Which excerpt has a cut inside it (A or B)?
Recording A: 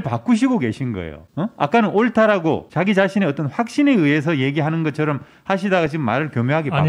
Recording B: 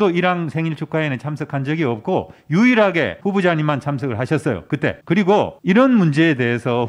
B